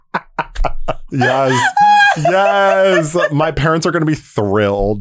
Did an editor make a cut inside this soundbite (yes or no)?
yes